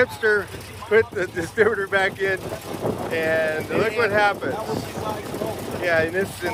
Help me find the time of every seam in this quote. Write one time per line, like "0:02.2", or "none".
none